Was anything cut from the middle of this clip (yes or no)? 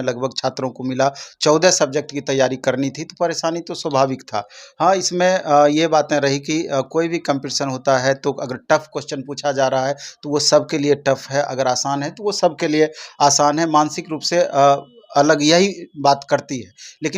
no